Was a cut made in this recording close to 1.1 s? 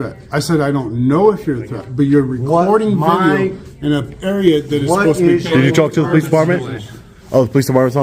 no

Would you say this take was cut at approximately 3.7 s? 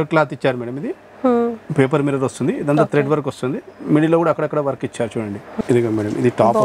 no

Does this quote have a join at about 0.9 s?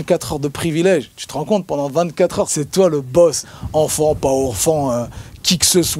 no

